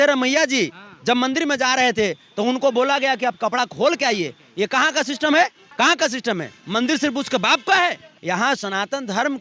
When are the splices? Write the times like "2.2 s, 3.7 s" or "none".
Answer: 5.6 s, 8.1 s